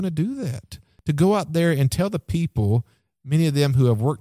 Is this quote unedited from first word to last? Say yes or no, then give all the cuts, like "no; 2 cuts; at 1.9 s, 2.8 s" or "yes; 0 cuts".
no; 1 cut; at 0.9 s